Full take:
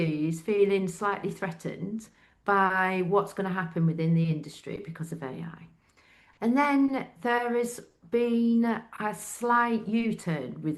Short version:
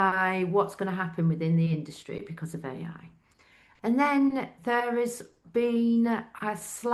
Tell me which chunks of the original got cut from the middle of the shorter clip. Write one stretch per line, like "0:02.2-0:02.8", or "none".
none